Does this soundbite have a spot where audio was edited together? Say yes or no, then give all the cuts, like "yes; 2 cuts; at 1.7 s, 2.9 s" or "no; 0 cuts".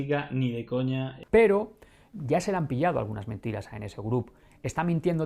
yes; 2 cuts; at 1.1 s, 2.1 s